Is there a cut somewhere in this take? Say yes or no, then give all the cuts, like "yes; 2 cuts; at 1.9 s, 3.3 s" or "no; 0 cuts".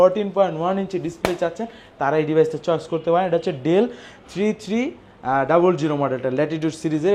no; 0 cuts